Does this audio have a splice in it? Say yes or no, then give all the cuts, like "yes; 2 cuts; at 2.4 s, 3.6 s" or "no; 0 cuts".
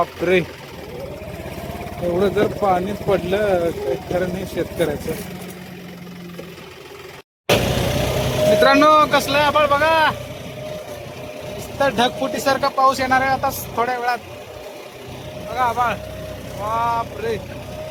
no; 0 cuts